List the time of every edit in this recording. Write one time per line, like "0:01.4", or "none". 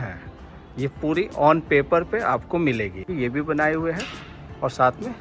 0:03.1